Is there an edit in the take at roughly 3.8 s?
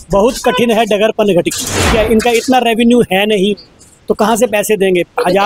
no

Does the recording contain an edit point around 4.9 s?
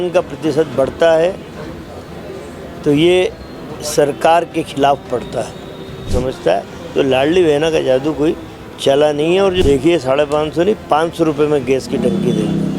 no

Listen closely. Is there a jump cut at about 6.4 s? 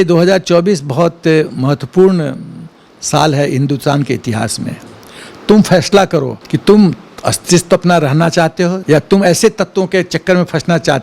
yes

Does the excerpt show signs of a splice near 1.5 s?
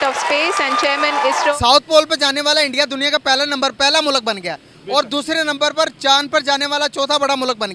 yes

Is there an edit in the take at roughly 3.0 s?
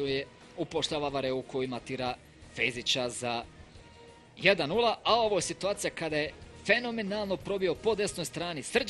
yes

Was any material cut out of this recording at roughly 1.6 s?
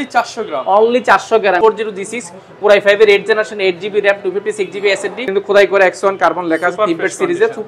yes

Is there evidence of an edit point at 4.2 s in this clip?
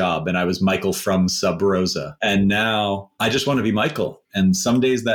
yes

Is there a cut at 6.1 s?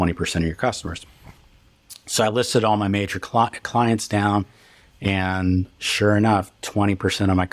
no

